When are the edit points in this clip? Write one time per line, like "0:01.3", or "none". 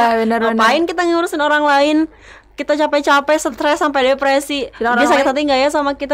none

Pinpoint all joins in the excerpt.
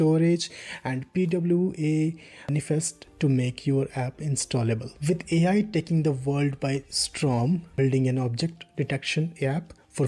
0:02.8
0:04.9
0:07.7

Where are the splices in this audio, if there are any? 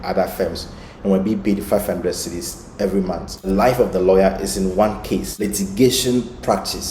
0:03.5
0:05.5

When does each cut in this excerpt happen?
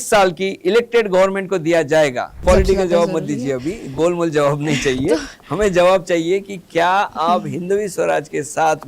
0:02.4

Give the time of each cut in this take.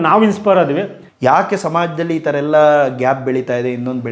0:01.0

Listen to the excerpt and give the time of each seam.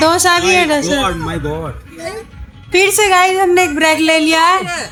none

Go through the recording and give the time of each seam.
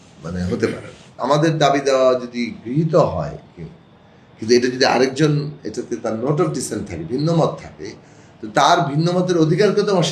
0:01.2

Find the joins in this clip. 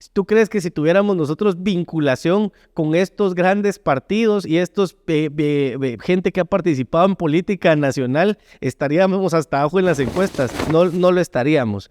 0:10.6

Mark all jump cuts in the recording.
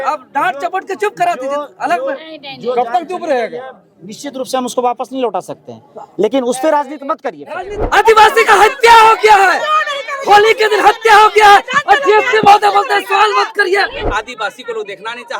0:07.8
0:14.0

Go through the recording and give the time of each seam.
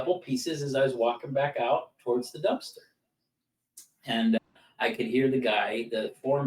none

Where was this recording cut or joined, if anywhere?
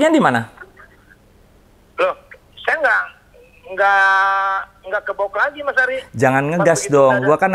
none

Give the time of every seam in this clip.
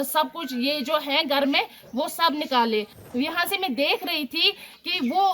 0:03.0

